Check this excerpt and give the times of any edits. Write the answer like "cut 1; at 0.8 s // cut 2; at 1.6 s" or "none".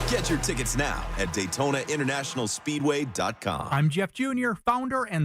cut 1; at 3.6 s